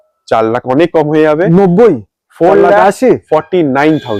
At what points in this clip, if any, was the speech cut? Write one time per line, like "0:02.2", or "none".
none